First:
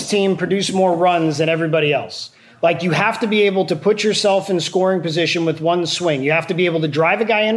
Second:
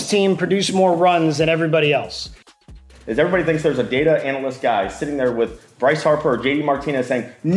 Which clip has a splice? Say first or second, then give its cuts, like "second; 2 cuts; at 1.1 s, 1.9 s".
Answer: second; 1 cut; at 2.5 s